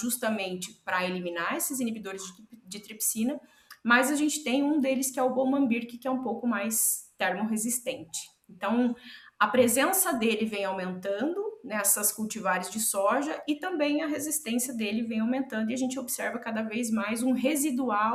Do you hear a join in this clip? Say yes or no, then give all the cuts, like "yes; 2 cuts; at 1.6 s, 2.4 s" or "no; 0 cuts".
no; 0 cuts